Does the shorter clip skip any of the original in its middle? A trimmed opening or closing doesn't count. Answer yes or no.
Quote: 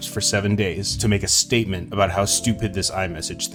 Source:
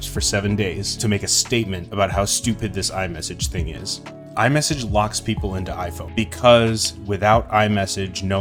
no